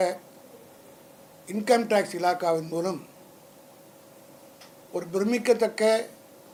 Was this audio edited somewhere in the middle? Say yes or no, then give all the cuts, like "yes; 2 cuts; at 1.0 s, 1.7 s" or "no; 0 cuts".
no; 0 cuts